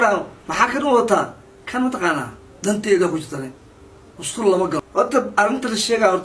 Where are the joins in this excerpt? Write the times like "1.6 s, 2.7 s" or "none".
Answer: 4.9 s